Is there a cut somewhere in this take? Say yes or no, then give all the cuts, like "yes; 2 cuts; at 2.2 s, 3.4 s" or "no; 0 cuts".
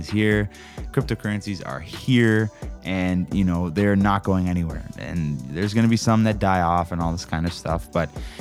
yes; 1 cut; at 6.9 s